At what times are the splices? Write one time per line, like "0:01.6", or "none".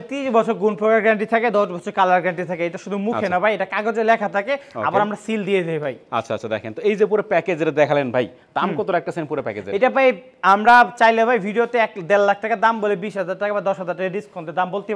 none